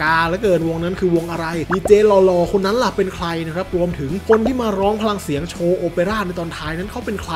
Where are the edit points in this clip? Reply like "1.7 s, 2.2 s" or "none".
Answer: none